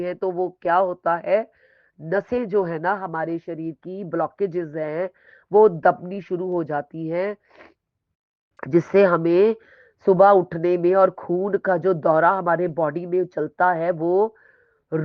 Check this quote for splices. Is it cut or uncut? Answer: uncut